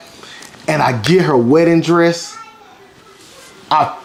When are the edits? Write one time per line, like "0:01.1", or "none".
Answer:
none